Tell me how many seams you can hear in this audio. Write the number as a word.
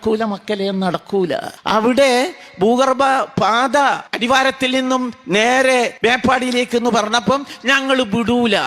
three